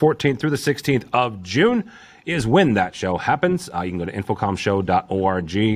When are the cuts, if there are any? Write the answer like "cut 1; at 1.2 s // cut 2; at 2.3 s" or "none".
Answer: none